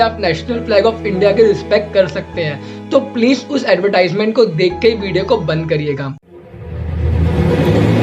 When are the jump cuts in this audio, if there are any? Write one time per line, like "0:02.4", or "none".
0:06.1